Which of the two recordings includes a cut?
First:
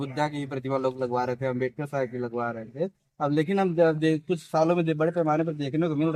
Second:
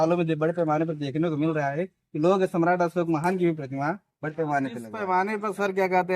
second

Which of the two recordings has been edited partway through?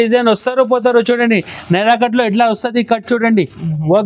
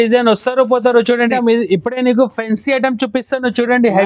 second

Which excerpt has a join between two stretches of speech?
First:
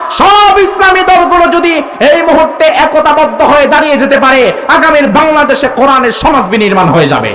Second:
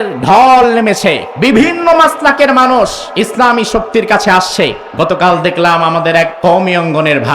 second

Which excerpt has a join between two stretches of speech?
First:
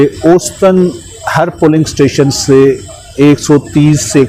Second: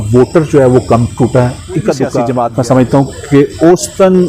second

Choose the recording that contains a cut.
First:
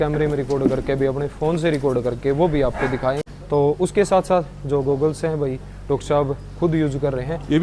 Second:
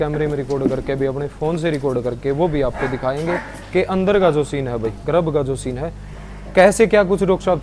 first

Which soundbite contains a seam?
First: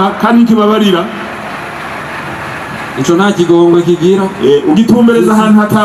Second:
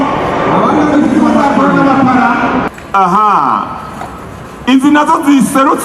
second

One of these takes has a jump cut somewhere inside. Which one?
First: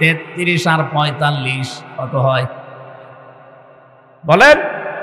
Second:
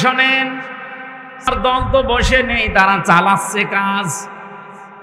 second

